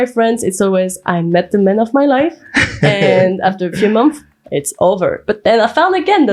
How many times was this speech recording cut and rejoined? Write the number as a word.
zero